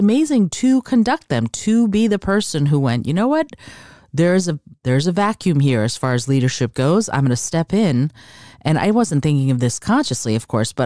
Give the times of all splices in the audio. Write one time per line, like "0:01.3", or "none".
none